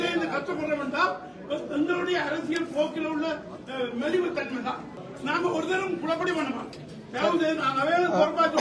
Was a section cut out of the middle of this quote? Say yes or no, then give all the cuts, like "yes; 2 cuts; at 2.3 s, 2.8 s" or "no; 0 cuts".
yes; 1 cut; at 5.0 s